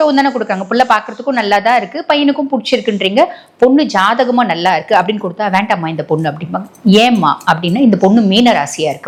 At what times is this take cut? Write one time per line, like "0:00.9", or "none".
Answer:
none